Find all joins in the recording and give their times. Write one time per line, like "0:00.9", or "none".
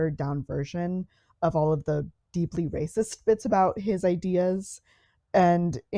none